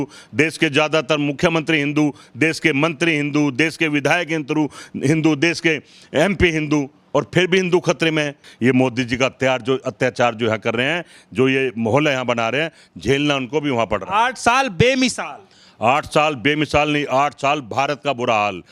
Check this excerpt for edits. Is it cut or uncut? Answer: uncut